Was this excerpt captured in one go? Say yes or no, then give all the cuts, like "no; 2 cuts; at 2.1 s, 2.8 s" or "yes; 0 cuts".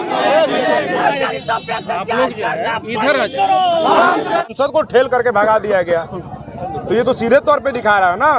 no; 1 cut; at 4.4 s